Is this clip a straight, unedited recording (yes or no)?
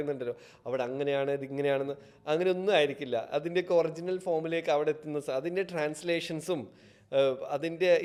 yes